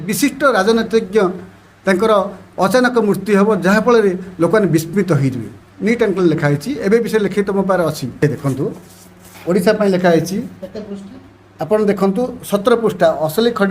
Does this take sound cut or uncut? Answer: cut